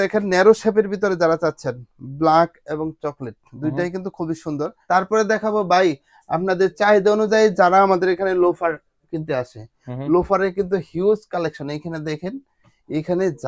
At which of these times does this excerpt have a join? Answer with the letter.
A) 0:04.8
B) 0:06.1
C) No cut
A